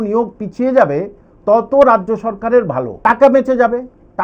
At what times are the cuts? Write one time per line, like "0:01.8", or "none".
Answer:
0:02.9